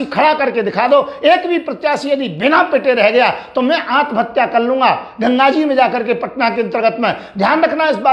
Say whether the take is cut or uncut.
uncut